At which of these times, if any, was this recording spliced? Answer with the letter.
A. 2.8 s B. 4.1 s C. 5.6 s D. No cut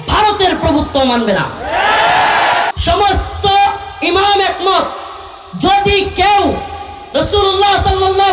A